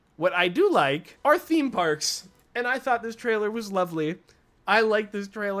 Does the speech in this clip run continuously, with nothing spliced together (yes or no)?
no